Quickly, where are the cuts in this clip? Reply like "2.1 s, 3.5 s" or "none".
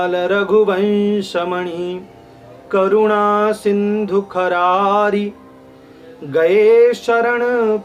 none

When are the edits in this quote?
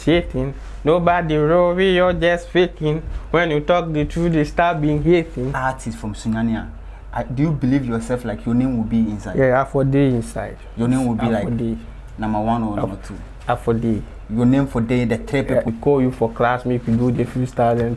5.6 s, 15.7 s

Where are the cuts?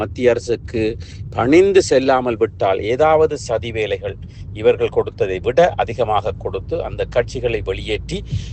none

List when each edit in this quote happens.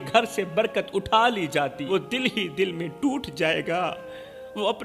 1.8 s

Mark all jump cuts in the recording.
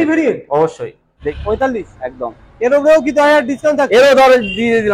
1.2 s

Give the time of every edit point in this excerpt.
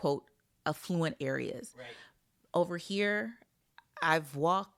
none

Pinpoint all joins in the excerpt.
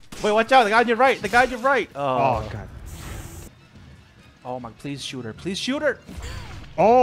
3.5 s

